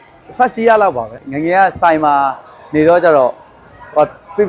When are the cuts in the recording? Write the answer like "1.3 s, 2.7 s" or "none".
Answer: 1.1 s